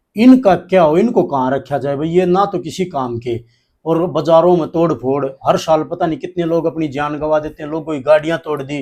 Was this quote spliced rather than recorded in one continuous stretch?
no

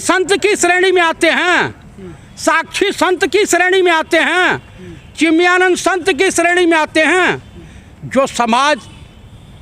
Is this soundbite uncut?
yes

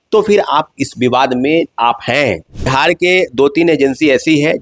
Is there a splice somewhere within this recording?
yes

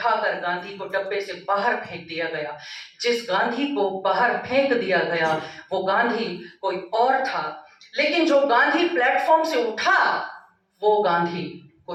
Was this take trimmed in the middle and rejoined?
no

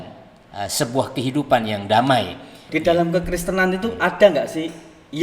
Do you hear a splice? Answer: yes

